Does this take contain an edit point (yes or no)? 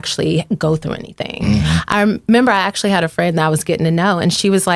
no